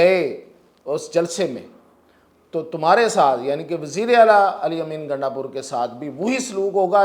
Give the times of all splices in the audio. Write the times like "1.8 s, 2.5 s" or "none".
none